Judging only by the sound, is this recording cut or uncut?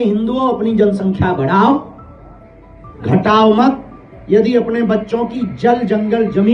uncut